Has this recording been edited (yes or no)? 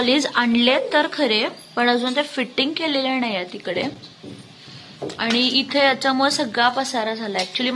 no